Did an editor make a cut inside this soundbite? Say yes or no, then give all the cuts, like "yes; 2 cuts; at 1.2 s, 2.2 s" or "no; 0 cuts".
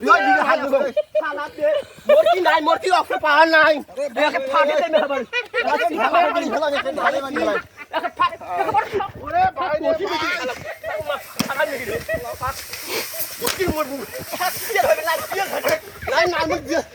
no; 0 cuts